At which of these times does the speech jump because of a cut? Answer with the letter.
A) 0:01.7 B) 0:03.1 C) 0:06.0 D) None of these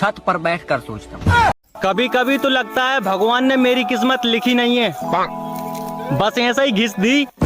A